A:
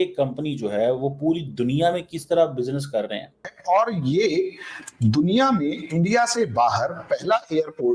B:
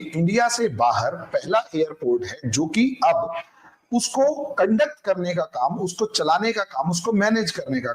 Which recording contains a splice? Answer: A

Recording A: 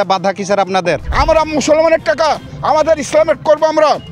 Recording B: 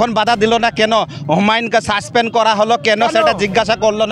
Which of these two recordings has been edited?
A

